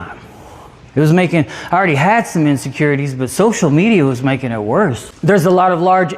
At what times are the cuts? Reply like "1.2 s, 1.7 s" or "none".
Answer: 5.1 s